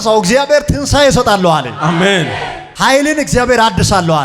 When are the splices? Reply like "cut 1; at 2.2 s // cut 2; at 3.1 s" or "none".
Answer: cut 1; at 2.7 s